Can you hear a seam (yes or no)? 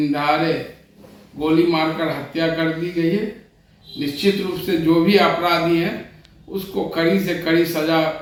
no